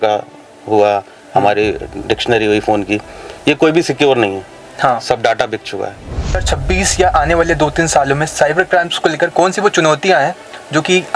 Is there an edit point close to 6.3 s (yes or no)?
yes